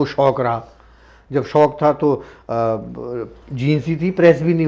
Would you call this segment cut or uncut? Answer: uncut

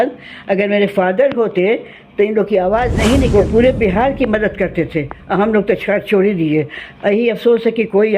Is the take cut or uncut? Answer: cut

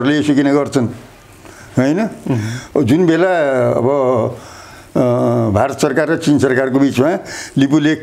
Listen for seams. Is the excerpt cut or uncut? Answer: uncut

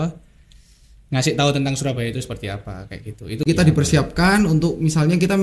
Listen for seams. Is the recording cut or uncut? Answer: cut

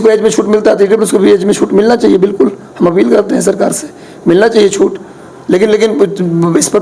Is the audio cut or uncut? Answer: uncut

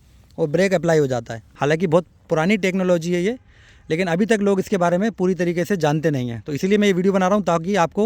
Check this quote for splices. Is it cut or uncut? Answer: cut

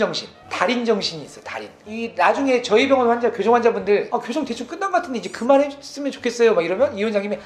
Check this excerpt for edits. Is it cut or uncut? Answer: cut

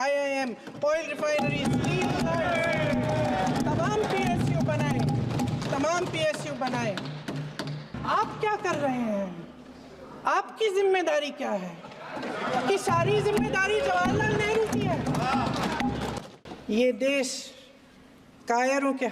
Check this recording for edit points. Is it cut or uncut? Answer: cut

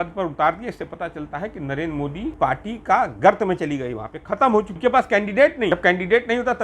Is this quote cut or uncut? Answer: cut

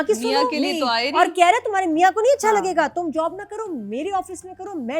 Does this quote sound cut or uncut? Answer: uncut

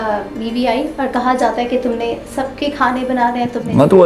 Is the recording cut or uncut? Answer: uncut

